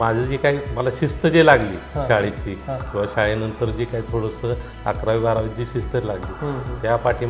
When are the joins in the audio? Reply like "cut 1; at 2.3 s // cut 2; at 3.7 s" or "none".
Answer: none

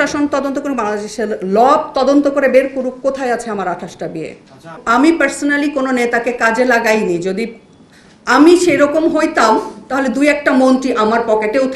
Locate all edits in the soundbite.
cut 1; at 4.8 s

